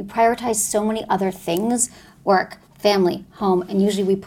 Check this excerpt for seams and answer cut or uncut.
uncut